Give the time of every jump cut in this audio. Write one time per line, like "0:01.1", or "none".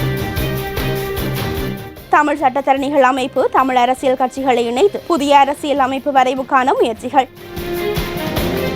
0:01.9
0:05.0
0:07.5